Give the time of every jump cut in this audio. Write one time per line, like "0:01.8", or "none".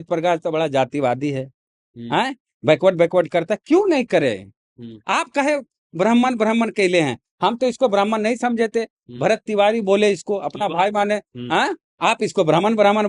0:11.8